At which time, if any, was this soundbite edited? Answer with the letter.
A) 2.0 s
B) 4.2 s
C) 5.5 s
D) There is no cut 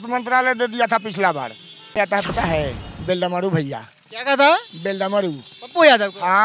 A